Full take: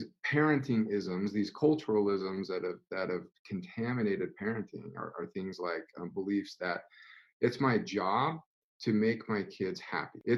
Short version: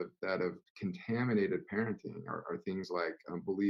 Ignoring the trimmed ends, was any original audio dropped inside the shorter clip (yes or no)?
no